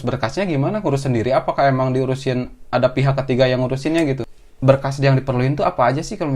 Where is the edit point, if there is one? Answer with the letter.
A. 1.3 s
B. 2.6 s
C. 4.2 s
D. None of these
C